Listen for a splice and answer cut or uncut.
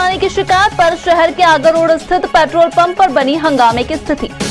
uncut